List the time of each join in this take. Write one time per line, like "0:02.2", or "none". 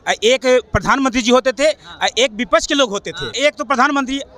0:03.4